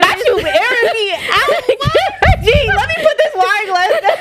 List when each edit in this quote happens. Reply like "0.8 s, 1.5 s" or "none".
none